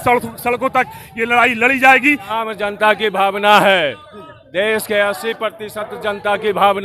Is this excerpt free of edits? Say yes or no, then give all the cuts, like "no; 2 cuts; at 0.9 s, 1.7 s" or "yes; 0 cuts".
no; 1 cut; at 2.4 s